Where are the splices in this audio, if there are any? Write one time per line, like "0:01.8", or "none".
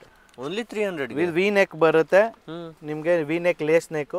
none